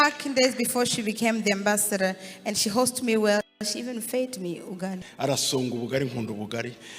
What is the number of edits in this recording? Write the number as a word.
one